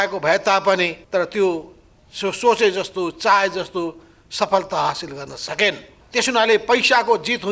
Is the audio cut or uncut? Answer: cut